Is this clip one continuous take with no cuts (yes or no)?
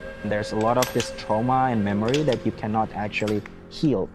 yes